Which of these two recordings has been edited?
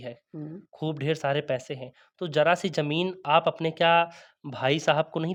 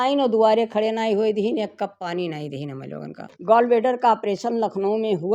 second; 1 cut; at 3.3 s

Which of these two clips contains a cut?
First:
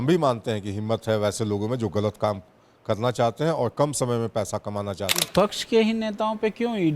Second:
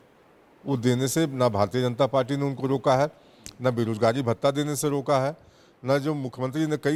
first; 1 cut; at 5.1 s

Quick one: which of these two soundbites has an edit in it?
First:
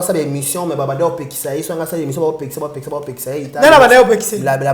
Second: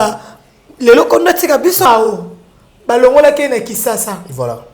second; 1 cut; at 1.9 s

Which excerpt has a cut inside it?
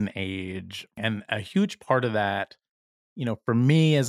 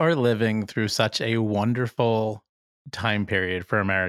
first; 1 cut; at 0.9 s

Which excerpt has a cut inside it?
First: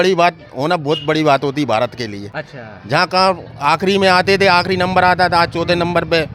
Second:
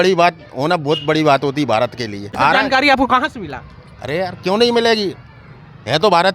second; 1 cut; at 2.3 s

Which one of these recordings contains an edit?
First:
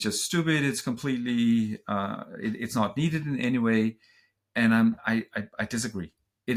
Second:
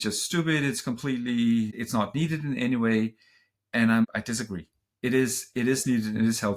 second; 2 cuts; at 1.8 s, 4.0 s

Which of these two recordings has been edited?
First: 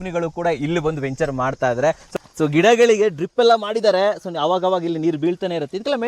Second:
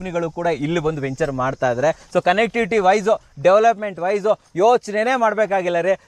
first; 1 cut; at 2.0 s

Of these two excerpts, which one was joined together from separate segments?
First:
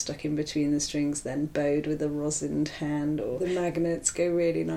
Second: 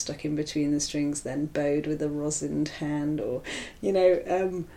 first; 1 cut; at 3.4 s

